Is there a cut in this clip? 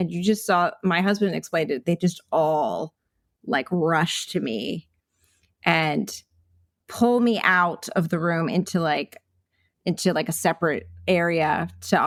no; 0 cuts

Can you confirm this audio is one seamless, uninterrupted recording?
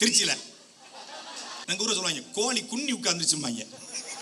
no; 1 cut; at 1.6 s

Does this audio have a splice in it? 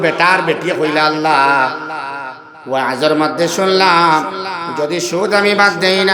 no; 0 cuts

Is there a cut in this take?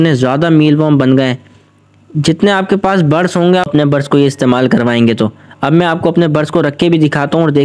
yes; 1 cut; at 3.7 s

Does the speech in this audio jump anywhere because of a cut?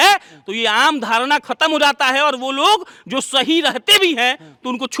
no; 0 cuts

